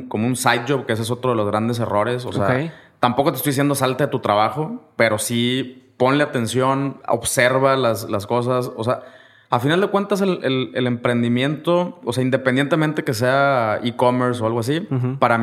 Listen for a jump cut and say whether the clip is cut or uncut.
uncut